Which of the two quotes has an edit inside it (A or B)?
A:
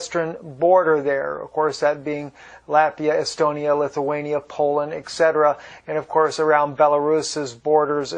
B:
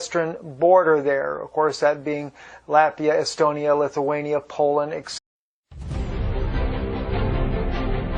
A